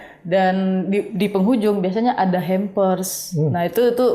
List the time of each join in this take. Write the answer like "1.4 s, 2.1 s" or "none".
none